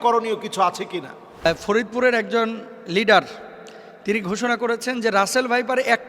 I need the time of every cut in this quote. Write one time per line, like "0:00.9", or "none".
0:01.5

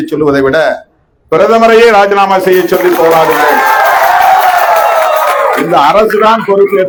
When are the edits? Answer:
none

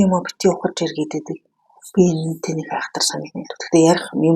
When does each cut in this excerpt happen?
none

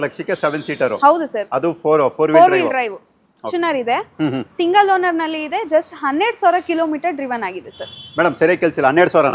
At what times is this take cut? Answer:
0:03.5

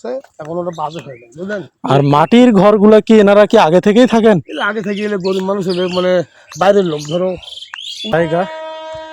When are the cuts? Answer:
0:08.1

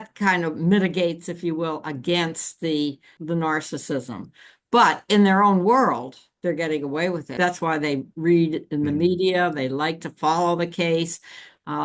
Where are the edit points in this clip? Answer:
0:03.2
0:07.4

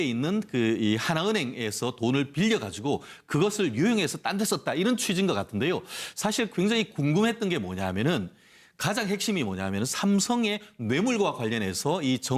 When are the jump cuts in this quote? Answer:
0:03.1

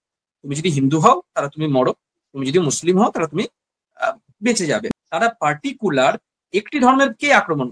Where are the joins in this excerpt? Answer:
0:04.8

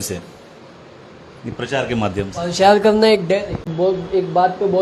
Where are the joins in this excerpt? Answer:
0:03.7

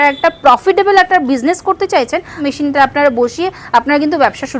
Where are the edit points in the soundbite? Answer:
0:02.4

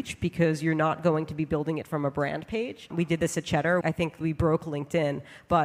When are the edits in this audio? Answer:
0:04.0

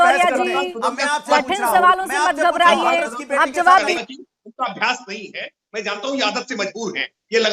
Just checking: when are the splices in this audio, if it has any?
0:04.0

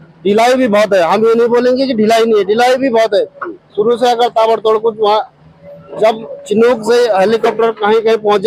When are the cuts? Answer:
none

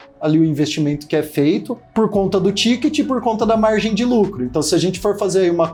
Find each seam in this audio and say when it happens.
none

